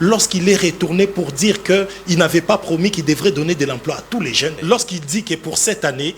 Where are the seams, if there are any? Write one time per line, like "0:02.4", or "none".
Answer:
0:04.6